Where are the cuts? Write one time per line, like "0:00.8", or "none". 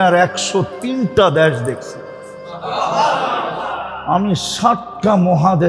none